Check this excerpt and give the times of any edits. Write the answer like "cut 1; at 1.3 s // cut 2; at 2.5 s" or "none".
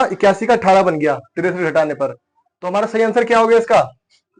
none